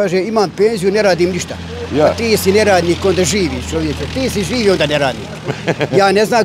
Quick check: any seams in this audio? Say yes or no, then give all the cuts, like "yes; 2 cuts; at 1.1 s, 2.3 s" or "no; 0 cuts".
no; 0 cuts